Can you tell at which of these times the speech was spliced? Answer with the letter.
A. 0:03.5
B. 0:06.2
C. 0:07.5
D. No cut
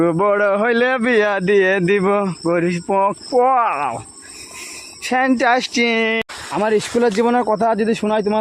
B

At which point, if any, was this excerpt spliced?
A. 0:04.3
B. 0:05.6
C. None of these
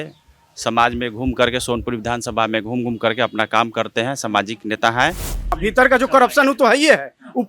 B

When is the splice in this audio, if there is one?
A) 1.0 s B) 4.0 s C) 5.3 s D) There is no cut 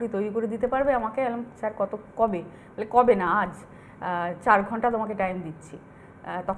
D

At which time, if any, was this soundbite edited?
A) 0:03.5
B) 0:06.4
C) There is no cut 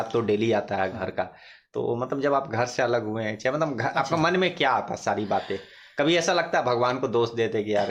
C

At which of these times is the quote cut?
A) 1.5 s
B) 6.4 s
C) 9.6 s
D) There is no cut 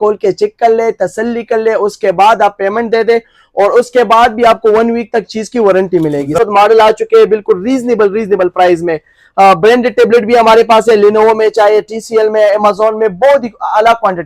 B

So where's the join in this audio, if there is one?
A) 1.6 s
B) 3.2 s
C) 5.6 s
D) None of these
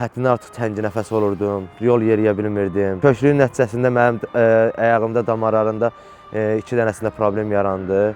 D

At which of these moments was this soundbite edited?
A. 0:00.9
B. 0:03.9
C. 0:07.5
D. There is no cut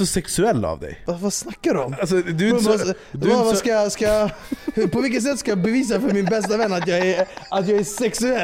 A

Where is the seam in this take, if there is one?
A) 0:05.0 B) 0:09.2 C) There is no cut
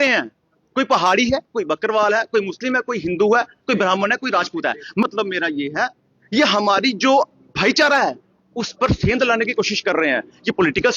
A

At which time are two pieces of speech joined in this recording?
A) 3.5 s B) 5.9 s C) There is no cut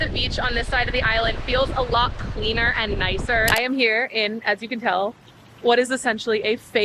A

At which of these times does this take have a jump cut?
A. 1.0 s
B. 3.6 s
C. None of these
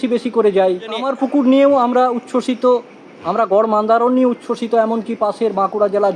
A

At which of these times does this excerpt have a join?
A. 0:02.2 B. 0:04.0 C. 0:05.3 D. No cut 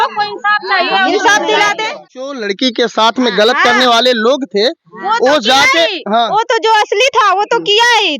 A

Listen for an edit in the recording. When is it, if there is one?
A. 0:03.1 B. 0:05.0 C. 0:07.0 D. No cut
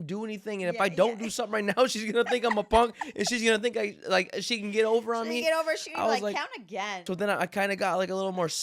C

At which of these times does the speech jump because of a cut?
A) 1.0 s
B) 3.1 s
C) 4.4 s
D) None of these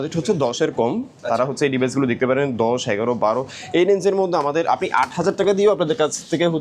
D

